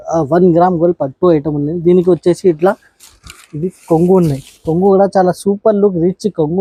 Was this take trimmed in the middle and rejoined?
no; 0 cuts

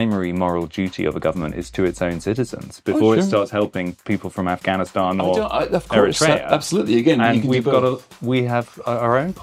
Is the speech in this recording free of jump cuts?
yes; 0 cuts

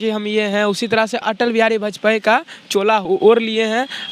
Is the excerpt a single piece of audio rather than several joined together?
no; 2 cuts; at 1.2 s, 3.1 s

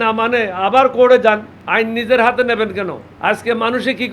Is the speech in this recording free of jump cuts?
no; 2 cuts; at 1.5 s, 3.0 s

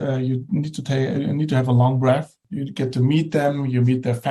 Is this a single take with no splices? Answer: no; 1 cut; at 2.4 s

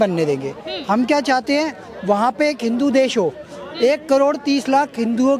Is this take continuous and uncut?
yes; 0 cuts

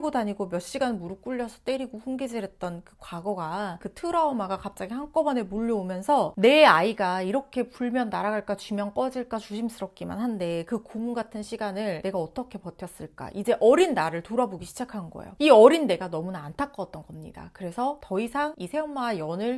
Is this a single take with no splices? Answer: yes; 0 cuts

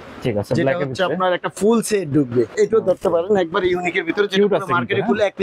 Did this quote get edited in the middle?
yes; 1 cut; at 2.5 s

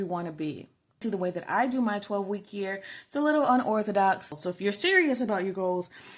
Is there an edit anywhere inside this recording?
yes; 2 cuts; at 1.0 s, 4.3 s

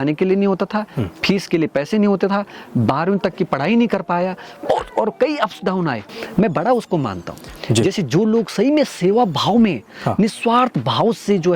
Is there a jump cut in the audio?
yes; 1 cut; at 6.2 s

